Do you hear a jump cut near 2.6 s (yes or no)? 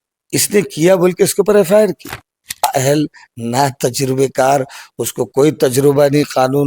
yes